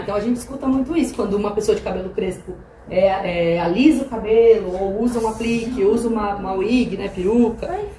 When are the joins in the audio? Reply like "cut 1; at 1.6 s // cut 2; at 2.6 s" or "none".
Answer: none